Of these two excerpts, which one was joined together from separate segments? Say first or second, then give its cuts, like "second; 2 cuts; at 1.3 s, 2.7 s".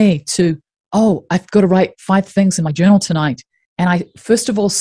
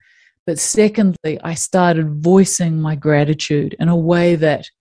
second; 1 cut; at 1.2 s